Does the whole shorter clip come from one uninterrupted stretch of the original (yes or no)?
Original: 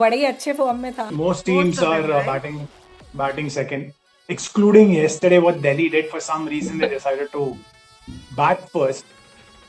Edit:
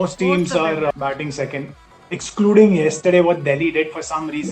no